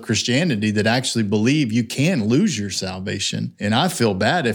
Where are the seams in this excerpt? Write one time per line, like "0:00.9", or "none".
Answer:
0:03.5